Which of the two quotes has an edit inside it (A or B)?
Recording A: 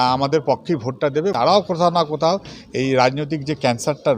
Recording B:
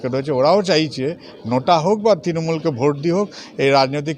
A